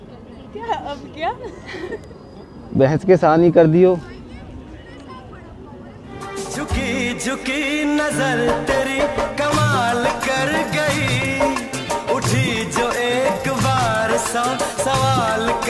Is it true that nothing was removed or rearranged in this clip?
no; 1 cut; at 6.2 s

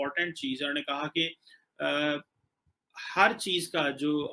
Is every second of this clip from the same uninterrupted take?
yes; 0 cuts

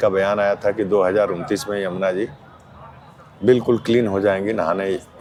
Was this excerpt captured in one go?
yes; 0 cuts

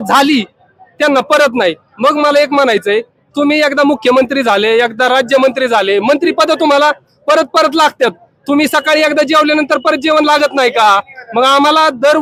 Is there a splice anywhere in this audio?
no; 0 cuts

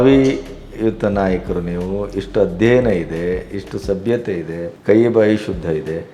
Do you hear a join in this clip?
yes; 1 cut; at 4.7 s

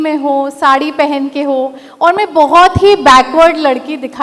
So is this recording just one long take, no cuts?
yes; 0 cuts

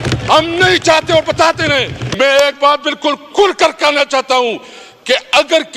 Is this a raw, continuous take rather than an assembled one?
no; 1 cut; at 2.0 s

